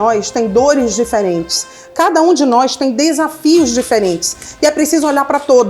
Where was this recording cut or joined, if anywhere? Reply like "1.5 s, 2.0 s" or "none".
none